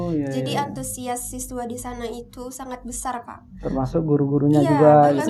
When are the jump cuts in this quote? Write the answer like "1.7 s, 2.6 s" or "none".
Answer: none

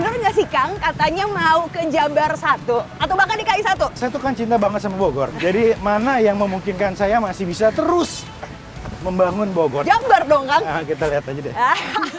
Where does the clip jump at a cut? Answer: 4.0 s, 5.3 s, 9.8 s

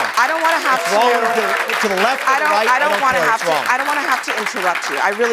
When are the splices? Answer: none

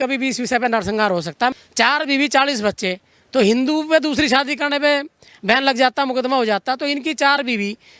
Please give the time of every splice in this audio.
1.5 s

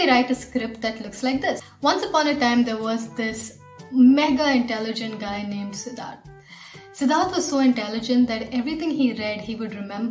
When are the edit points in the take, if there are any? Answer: 1.6 s

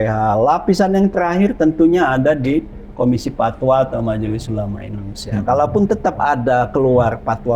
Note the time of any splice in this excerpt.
none

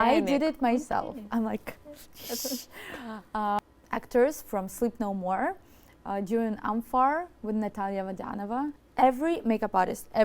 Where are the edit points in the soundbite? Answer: 3.6 s, 8.8 s

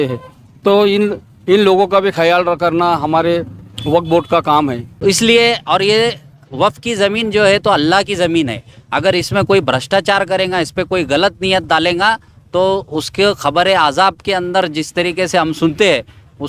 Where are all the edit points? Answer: 4.9 s

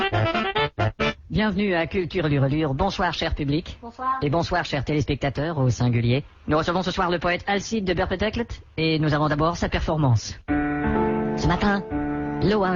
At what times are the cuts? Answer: none

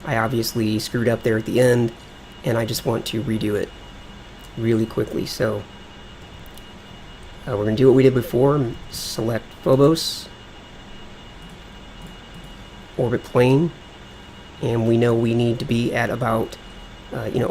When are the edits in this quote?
8.3 s

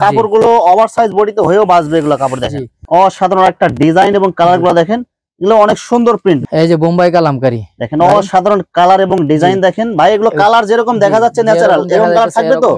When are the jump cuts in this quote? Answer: 2.8 s, 6.4 s

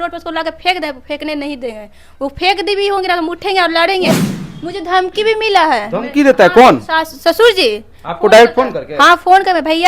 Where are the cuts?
4.2 s

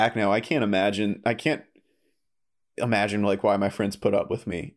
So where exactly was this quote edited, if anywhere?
none

